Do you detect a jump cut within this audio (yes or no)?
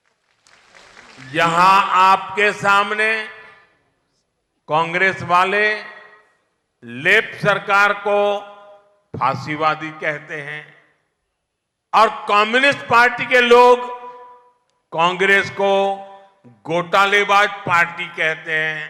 no